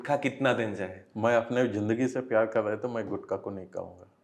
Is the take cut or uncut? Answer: uncut